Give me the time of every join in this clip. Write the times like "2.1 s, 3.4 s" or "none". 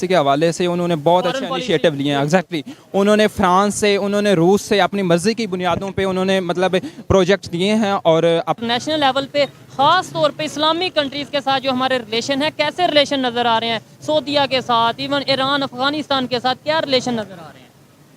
8.6 s

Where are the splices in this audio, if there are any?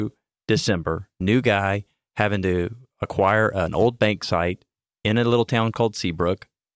none

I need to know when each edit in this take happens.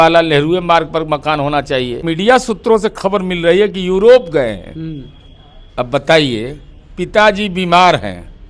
2.0 s

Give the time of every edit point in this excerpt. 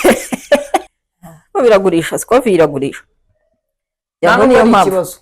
0.9 s

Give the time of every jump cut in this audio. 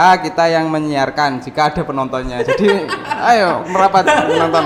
none

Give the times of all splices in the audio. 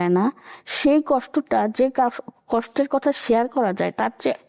none

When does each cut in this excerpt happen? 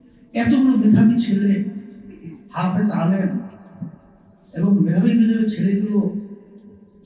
none

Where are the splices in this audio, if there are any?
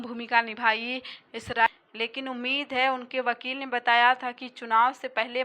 1.7 s

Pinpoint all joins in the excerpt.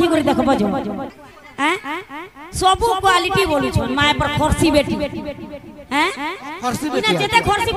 1.1 s

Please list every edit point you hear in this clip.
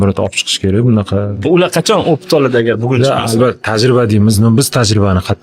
none

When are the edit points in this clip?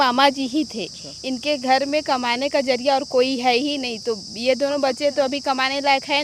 none

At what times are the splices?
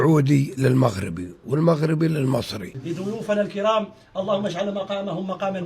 2.8 s

